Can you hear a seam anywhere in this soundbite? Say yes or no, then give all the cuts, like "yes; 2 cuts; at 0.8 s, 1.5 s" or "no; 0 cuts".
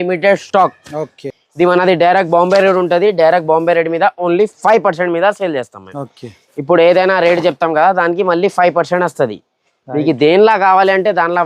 yes; 1 cut; at 1.3 s